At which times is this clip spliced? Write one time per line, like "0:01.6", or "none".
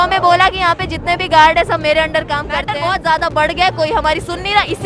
0:02.7